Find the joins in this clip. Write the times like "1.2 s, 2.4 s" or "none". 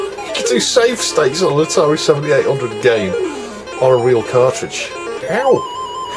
none